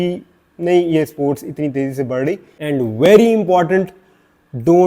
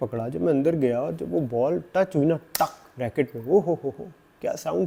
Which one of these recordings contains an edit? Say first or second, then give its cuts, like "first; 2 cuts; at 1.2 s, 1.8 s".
first; 1 cut; at 2.5 s